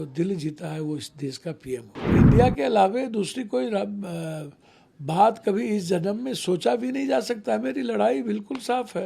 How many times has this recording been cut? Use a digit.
1